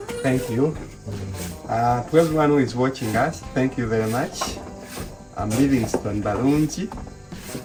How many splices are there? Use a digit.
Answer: 0